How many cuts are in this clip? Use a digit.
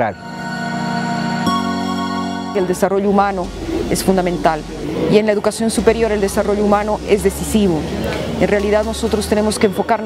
1